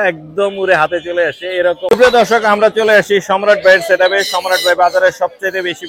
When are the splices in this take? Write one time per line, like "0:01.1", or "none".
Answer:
0:01.9